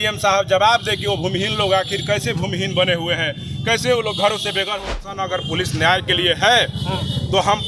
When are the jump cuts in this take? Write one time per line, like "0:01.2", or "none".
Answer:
0:04.9